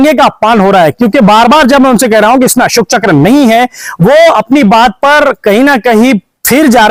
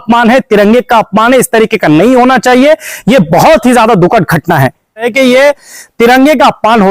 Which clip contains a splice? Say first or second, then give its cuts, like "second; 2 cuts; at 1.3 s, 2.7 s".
second; 1 cut; at 5.1 s